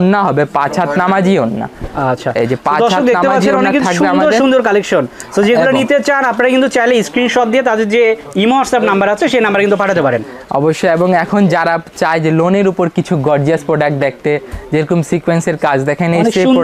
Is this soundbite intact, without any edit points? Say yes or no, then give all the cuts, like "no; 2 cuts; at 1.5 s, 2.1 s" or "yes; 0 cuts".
yes; 0 cuts